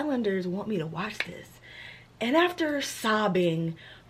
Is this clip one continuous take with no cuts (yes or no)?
yes